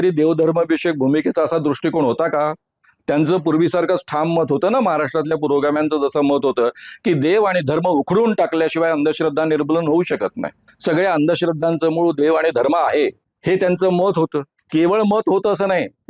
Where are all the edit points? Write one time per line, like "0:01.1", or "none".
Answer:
none